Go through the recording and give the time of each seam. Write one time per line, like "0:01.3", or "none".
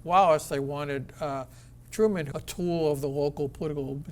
0:02.3

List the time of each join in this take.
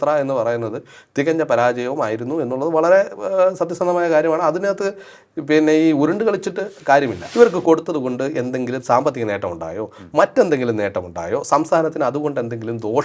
0:07.2

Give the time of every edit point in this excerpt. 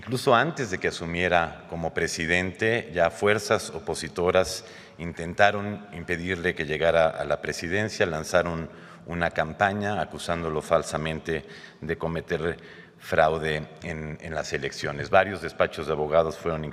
none

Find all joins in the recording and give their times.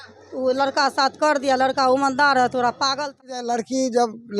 0:03.4

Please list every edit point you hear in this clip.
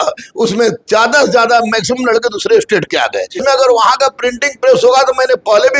0:03.4

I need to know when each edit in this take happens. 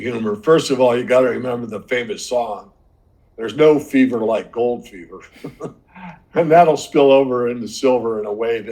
none

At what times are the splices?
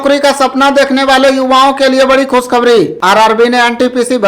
0:03.0

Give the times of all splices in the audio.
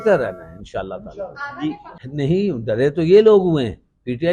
0:01.9

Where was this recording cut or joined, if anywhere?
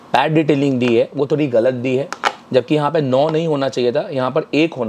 none

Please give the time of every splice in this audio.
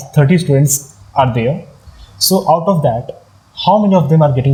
none

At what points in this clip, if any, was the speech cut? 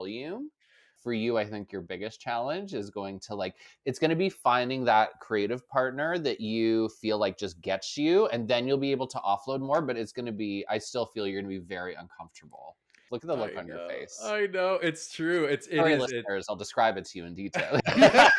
0:00.9
0:13.0

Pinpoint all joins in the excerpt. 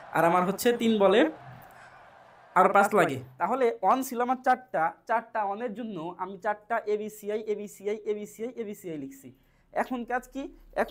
0:03.2

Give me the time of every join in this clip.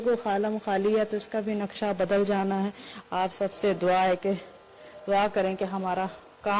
none

